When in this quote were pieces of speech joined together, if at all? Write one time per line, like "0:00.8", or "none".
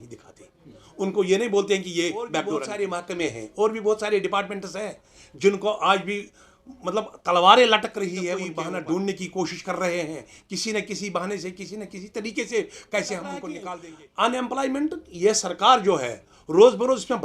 0:02.7
0:08.5
0:13.7